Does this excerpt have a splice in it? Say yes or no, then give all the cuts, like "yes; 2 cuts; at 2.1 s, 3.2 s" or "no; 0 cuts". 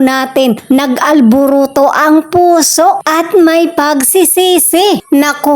yes; 1 cut; at 3.0 s